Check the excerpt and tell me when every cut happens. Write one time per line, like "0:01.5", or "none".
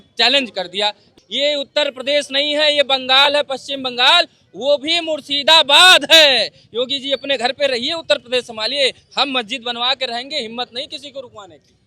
0:01.1